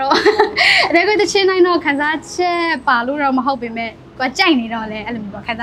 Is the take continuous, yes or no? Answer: yes